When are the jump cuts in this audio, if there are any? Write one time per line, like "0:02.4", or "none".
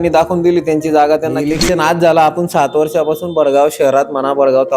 0:01.5